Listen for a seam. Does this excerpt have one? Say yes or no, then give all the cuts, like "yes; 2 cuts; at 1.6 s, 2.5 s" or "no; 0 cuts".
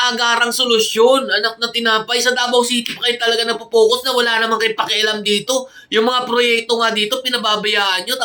no; 0 cuts